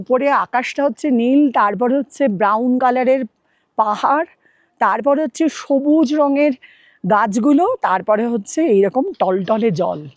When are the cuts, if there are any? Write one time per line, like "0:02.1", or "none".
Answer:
none